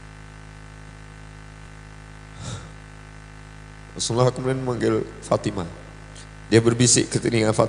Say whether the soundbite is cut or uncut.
cut